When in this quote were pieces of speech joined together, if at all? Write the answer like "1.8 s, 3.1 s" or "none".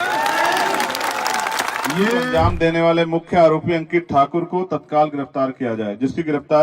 2.3 s